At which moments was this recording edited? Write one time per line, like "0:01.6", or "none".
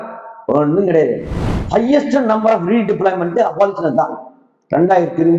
0:01.5